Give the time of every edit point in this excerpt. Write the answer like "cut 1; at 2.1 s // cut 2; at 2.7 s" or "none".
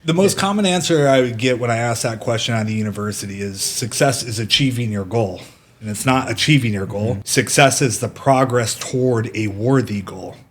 cut 1; at 5.9 s // cut 2; at 7.2 s

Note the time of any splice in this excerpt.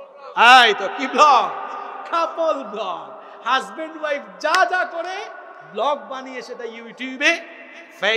none

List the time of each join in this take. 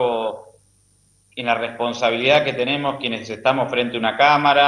cut 1; at 3.1 s

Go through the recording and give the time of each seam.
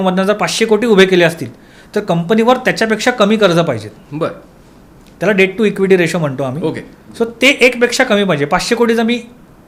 none

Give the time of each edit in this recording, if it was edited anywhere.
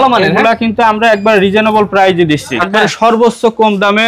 cut 1; at 2.7 s

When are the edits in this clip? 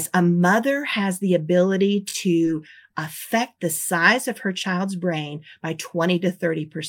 cut 1; at 2.8 s

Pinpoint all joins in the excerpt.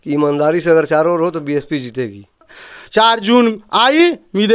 cut 1; at 2.6 s

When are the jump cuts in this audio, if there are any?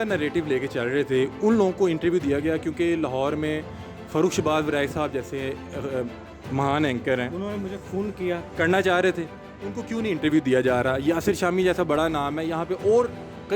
none

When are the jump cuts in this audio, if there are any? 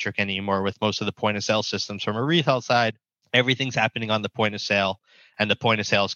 cut 1; at 3.1 s

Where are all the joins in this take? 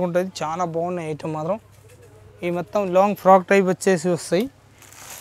none

